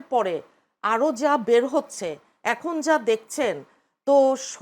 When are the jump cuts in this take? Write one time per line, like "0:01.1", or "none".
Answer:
none